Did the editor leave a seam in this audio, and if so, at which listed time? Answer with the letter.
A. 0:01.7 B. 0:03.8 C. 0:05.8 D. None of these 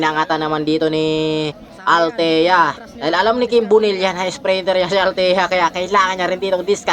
A